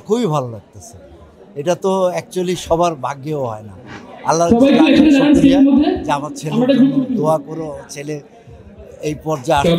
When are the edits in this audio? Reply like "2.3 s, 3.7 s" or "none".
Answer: none